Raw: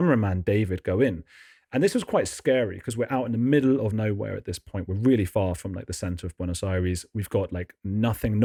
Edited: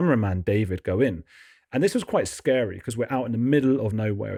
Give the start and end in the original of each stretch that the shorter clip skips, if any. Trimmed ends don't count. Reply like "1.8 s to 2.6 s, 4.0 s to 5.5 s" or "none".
none